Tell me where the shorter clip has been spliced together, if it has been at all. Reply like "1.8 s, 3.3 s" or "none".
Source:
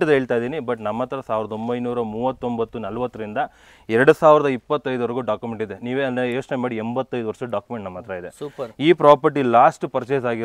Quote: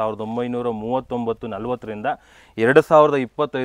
none